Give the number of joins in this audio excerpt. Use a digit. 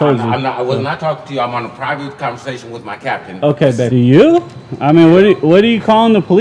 1